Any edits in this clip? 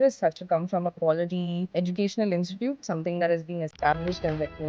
no; 0 cuts

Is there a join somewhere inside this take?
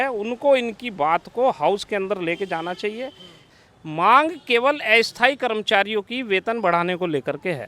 yes; 1 cut; at 3.5 s

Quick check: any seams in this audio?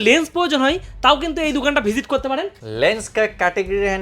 yes; 1 cut; at 2.6 s

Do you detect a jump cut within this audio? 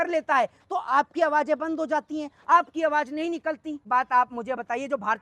yes; 1 cut; at 3.9 s

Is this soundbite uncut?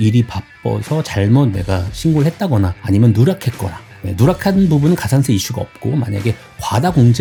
yes; 0 cuts

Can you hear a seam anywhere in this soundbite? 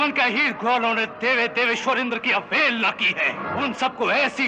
yes; 1 cut; at 3.4 s

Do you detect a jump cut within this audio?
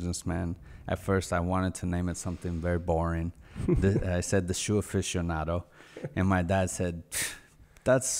no; 0 cuts

